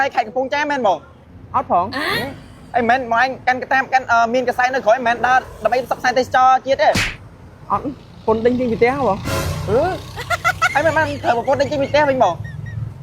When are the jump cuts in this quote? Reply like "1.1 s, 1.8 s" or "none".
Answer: 2.0 s